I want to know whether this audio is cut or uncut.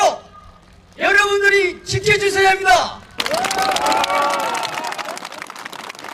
cut